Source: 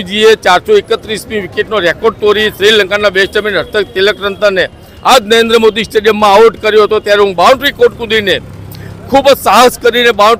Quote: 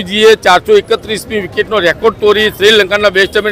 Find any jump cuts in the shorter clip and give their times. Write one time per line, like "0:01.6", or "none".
none